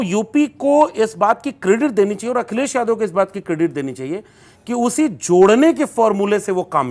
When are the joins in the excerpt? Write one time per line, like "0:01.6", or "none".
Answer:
none